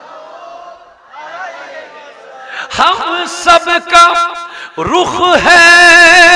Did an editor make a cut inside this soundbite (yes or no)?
no